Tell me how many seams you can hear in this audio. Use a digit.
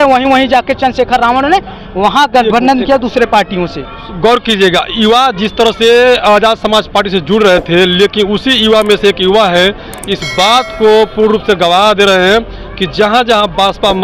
0